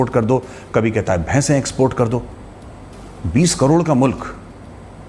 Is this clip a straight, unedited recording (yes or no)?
yes